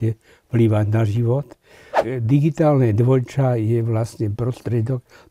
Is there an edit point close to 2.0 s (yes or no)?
yes